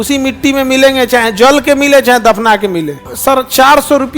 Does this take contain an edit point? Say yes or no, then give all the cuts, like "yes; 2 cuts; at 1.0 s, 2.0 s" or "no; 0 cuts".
yes; 1 cut; at 3.0 s